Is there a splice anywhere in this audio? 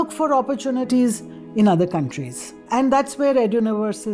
yes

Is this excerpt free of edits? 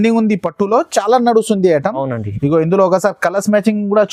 yes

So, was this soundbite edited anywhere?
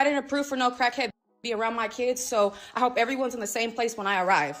no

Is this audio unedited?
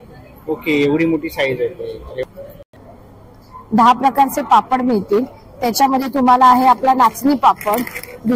no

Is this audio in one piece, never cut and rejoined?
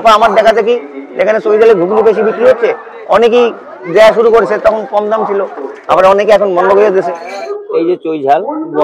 no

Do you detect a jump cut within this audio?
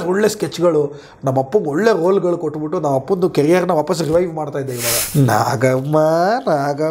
yes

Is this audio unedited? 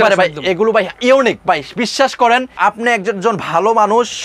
no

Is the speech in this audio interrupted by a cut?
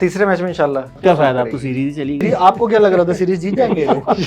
yes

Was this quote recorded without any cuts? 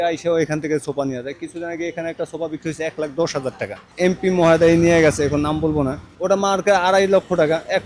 no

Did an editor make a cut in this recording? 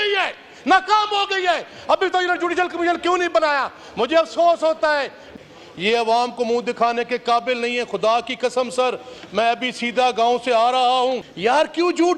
yes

